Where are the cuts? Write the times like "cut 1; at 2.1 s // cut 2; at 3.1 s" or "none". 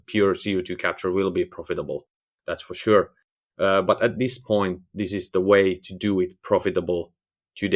none